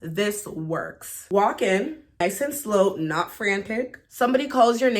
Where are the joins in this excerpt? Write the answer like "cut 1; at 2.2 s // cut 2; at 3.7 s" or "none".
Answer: cut 1; at 1.1 s // cut 2; at 2.2 s // cut 3; at 4.0 s